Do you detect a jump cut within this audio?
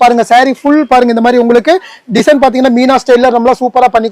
no; 0 cuts

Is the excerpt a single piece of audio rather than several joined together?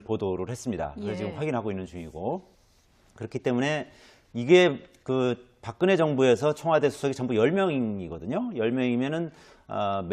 no; 1 cut; at 3.6 s

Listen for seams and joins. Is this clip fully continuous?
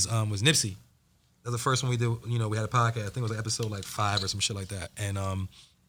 yes; 0 cuts

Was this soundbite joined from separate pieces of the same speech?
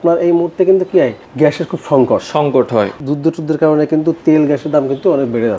yes; 1 cut; at 3.0 s

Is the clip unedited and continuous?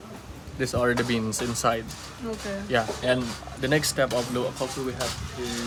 yes; 0 cuts

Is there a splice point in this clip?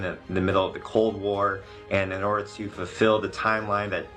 no; 0 cuts

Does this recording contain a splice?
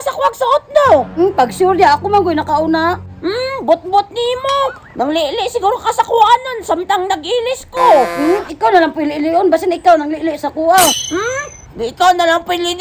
no; 0 cuts

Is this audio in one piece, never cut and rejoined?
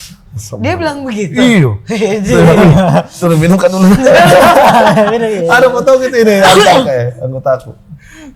yes; 0 cuts

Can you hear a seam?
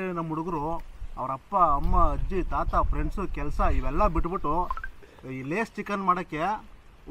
no; 0 cuts

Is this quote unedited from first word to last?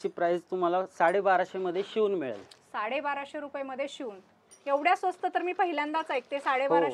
yes; 0 cuts

